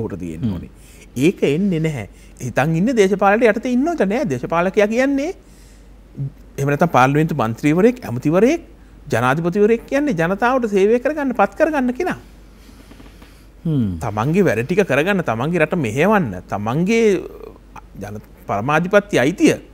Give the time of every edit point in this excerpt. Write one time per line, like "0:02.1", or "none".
0:02.2